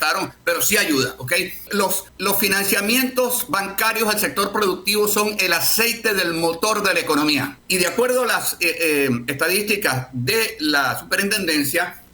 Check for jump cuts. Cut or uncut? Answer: cut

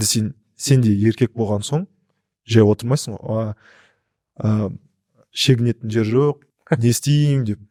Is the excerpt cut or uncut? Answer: uncut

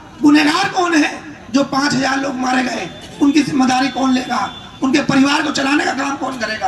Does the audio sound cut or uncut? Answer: uncut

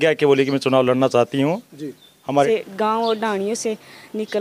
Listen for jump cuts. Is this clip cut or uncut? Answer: cut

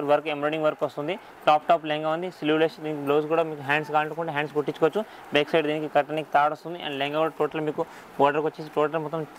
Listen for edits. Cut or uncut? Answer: uncut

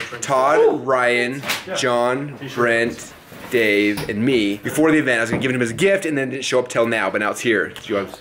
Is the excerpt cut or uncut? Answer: cut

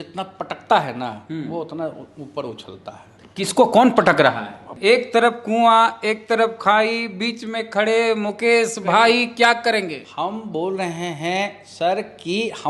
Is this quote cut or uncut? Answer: cut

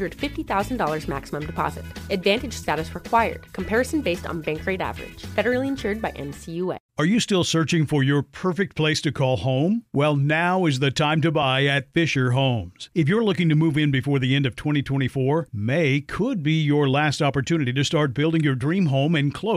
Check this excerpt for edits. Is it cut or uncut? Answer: cut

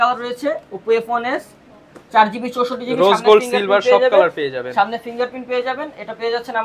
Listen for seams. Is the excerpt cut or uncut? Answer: uncut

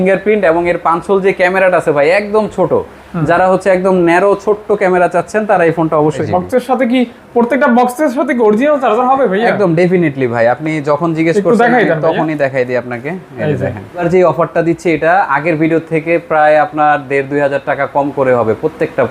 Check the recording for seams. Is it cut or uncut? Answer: cut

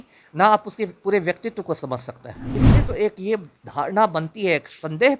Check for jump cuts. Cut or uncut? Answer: cut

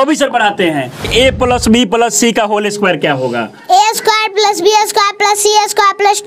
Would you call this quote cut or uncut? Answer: cut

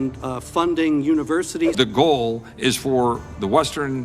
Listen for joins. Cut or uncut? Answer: cut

